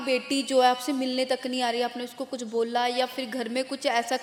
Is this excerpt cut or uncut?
uncut